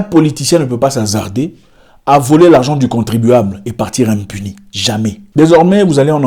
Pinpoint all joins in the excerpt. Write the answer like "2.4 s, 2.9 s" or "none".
5.2 s